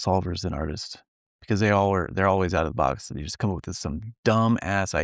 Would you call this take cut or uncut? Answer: uncut